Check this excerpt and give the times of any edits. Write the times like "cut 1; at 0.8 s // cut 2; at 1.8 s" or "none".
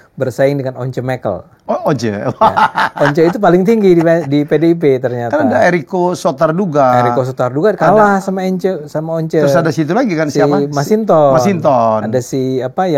none